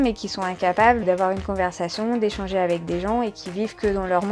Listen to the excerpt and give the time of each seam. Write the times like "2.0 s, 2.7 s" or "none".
1.0 s